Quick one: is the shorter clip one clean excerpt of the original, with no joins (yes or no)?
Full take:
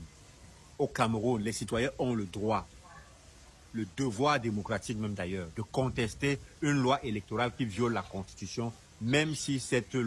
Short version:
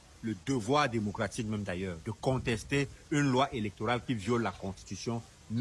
yes